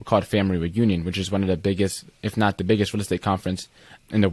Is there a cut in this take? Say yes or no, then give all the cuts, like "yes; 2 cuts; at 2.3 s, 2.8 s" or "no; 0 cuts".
no; 0 cuts